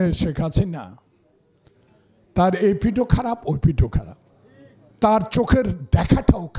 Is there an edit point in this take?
no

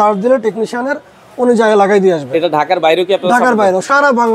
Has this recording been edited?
no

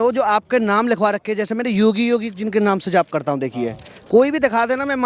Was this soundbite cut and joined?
no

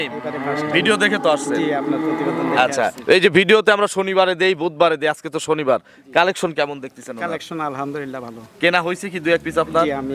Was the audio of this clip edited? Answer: no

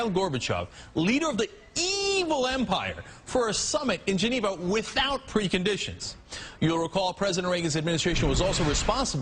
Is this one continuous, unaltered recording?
yes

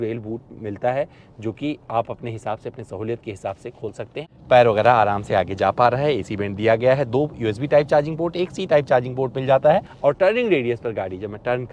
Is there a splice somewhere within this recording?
yes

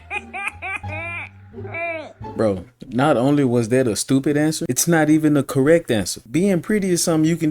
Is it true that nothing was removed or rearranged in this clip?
no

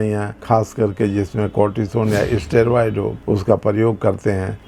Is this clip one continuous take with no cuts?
yes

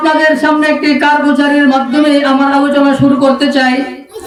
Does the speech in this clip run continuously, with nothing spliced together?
yes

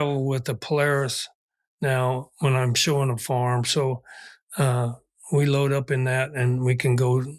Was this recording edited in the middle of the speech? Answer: no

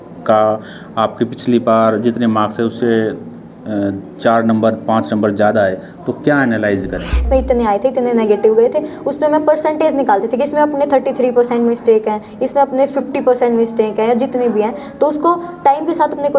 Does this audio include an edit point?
yes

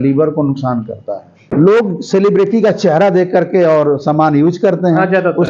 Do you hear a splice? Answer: yes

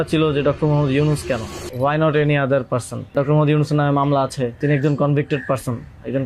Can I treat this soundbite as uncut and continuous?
no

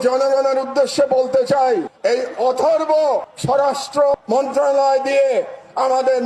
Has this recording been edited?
yes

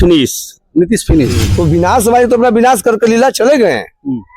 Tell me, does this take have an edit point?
yes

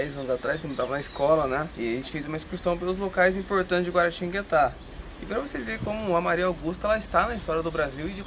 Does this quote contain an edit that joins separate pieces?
yes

